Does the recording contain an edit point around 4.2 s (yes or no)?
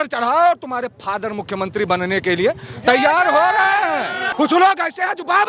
yes